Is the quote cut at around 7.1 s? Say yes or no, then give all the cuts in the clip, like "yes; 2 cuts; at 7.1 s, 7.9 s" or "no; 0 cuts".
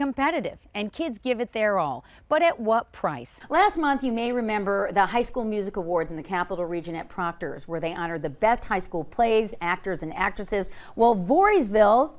no; 1 cut; at 3.3 s